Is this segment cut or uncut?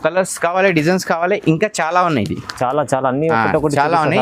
uncut